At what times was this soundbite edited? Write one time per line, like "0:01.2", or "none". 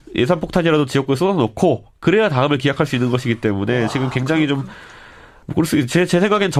none